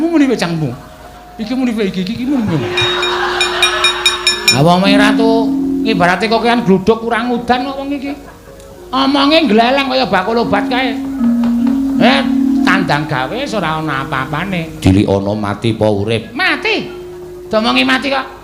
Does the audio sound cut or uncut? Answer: cut